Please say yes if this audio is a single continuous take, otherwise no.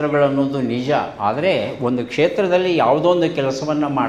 yes